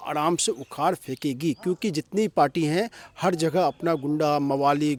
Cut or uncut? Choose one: uncut